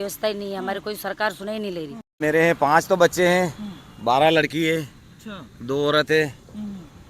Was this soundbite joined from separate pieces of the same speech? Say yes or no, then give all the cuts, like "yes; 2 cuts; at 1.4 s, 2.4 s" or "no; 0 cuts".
yes; 1 cut; at 2.1 s